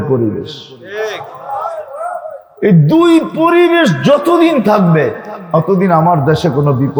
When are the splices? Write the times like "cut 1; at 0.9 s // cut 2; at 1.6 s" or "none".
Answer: none